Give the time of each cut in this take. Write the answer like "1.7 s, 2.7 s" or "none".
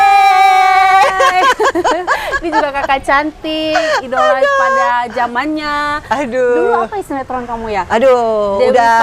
none